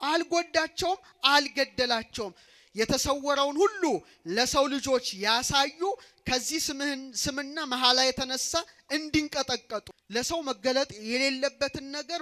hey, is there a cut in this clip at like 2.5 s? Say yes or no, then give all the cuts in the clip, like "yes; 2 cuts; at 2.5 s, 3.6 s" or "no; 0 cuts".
yes; 2 cuts; at 2.5 s, 10.0 s